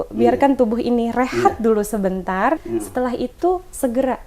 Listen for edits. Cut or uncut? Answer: cut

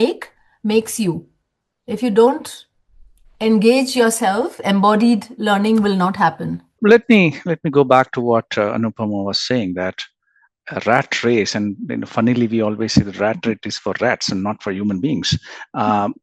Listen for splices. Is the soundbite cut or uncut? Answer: cut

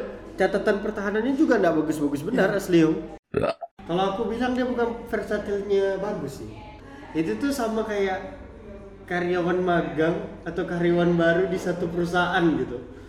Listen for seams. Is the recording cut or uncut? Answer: cut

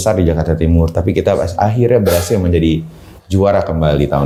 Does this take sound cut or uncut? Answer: uncut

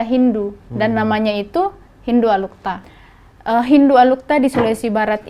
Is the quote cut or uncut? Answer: uncut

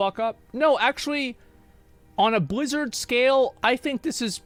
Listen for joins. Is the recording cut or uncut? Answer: uncut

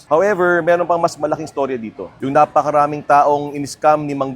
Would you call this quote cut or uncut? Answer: cut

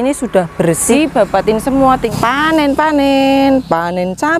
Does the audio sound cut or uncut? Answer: cut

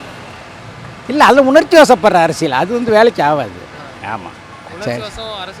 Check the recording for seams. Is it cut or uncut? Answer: uncut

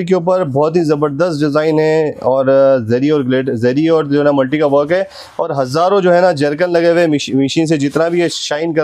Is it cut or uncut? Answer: uncut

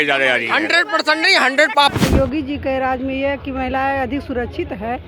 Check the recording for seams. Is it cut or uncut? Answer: cut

